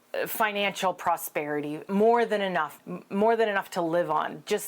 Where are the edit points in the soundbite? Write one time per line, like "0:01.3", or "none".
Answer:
0:01.8
0:02.7